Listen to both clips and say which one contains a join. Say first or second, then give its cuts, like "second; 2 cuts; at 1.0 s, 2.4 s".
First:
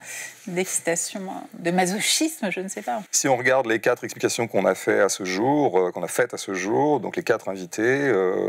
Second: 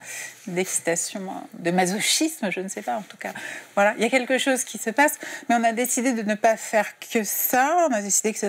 first; 1 cut; at 3.1 s